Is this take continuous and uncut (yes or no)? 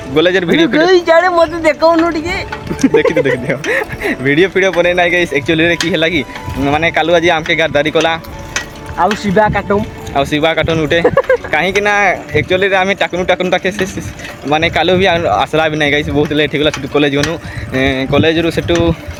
yes